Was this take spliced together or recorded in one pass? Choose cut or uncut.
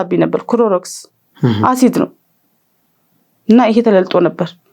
uncut